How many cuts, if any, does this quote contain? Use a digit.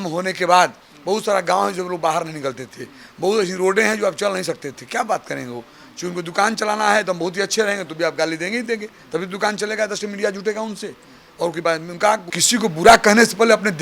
1